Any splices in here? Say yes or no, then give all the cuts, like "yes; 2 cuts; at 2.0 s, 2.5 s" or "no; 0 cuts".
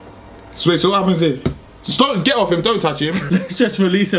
yes; 1 cut; at 3.2 s